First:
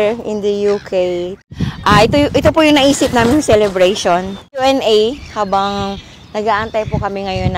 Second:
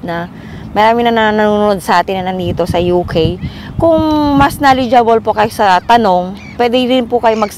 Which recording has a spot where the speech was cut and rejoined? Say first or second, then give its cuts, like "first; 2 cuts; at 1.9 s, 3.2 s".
first; 2 cuts; at 1.4 s, 4.6 s